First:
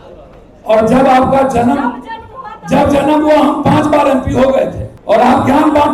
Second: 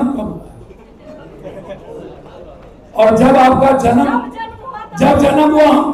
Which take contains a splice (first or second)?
first